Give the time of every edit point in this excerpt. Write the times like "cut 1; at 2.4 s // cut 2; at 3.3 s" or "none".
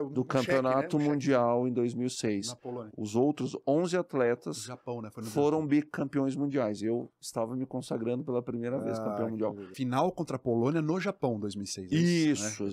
cut 1; at 2.9 s // cut 2; at 9.7 s